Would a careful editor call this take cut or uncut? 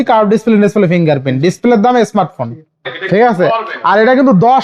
cut